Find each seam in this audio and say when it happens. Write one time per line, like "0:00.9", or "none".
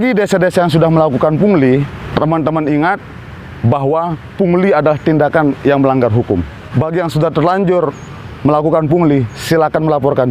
0:02.0
0:06.6